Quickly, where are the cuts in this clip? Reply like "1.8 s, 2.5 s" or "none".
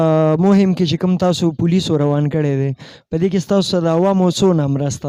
none